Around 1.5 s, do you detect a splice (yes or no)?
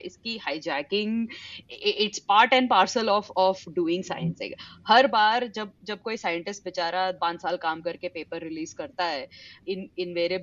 yes